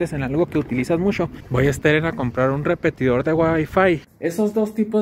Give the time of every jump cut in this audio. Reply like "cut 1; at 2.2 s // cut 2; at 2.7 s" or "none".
cut 1; at 1.4 s // cut 2; at 4.1 s